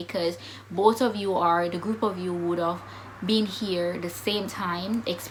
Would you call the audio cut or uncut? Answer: uncut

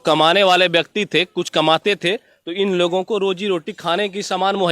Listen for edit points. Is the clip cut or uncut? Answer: uncut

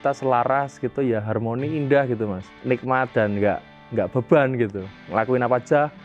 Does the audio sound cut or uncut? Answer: cut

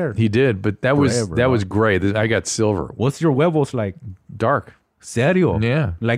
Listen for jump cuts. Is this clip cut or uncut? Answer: cut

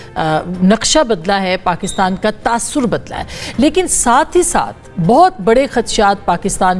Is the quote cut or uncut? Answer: uncut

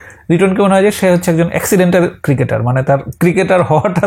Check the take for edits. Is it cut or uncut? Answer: uncut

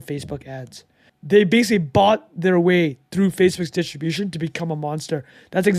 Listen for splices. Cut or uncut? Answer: cut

